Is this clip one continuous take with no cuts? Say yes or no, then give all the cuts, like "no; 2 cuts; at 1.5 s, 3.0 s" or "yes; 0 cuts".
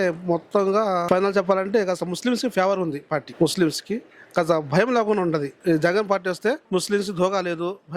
no; 4 cuts; at 1.0 s, 3.3 s, 5.5 s, 6.6 s